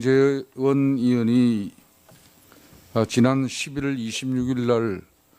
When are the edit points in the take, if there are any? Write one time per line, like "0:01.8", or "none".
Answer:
0:01.0